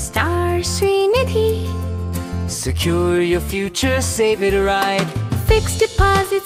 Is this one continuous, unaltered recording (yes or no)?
yes